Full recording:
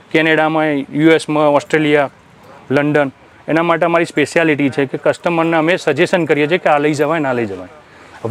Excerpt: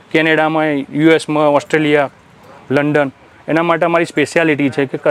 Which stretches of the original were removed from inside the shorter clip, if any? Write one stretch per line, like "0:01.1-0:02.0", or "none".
none